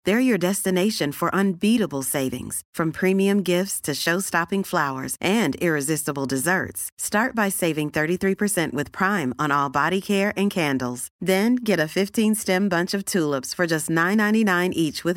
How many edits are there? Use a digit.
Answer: 0